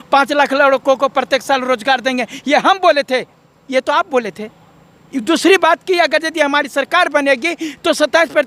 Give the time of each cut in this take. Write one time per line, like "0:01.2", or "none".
none